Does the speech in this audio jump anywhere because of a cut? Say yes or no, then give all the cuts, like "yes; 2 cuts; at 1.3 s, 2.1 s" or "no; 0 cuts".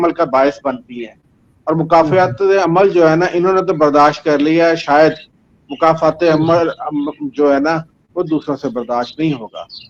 no; 0 cuts